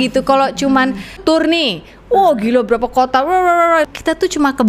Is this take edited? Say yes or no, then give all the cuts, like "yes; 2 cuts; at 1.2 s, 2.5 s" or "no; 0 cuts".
yes; 2 cuts; at 1.2 s, 3.9 s